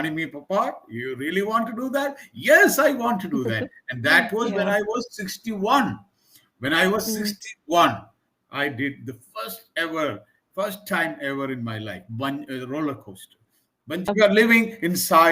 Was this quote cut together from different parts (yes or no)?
yes